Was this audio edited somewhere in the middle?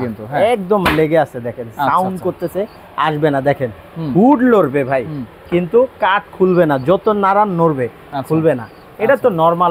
no; 0 cuts

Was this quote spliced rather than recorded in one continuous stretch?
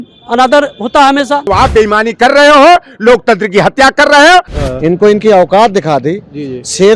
yes; 2 cuts; at 1.5 s, 4.6 s

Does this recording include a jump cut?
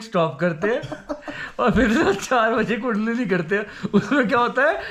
no; 0 cuts

